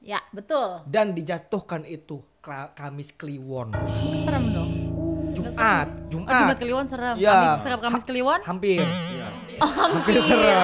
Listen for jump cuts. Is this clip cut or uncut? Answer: uncut